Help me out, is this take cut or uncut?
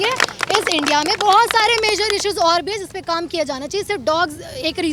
uncut